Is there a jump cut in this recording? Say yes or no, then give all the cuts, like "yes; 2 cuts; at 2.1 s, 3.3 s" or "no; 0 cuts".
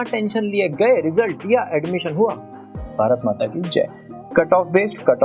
no; 0 cuts